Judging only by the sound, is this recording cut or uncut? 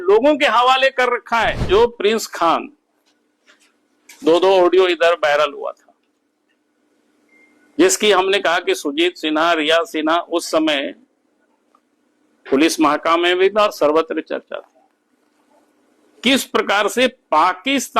cut